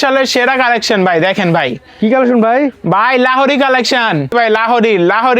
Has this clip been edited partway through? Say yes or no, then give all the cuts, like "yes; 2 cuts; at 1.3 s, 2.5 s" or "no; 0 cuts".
yes; 1 cut; at 4.3 s